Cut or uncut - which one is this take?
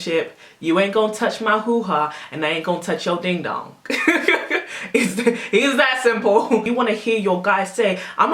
cut